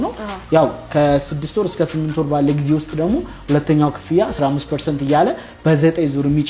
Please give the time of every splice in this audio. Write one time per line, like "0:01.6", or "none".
none

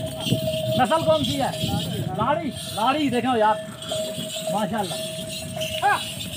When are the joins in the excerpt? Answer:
none

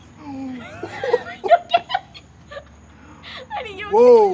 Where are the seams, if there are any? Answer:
none

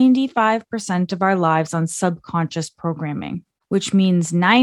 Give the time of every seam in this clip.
0:03.5

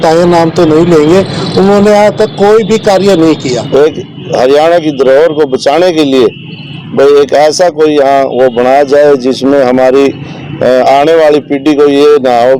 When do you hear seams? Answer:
0:03.6

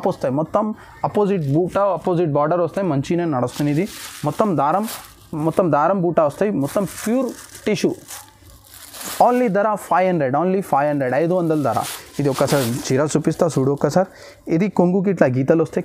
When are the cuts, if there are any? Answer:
none

